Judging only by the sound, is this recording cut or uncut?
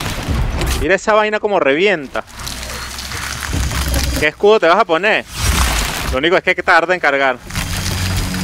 cut